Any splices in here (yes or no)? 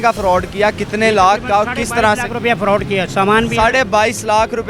no